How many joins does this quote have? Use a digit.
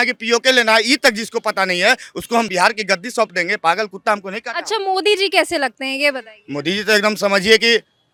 0